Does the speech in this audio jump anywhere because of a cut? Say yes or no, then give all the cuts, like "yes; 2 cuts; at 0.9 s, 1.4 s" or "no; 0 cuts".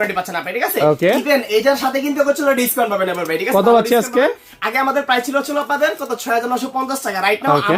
no; 0 cuts